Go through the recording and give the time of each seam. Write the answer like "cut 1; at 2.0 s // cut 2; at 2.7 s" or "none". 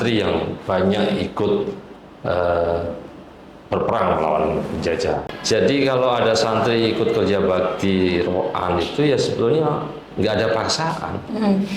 cut 1; at 5.3 s